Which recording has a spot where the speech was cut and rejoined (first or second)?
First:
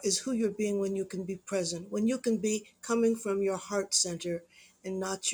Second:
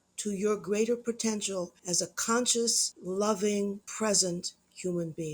second